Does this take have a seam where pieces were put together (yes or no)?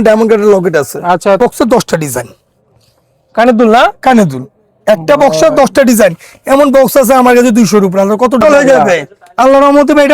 yes